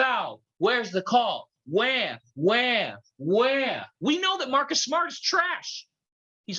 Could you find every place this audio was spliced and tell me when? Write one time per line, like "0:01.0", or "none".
0:03.9